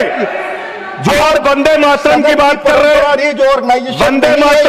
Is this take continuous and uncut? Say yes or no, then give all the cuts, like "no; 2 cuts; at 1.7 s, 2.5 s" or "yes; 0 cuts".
yes; 0 cuts